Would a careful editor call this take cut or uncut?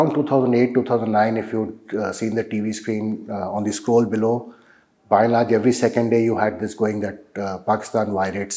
uncut